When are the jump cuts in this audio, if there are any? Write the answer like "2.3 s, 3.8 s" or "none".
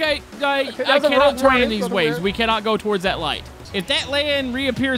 3.6 s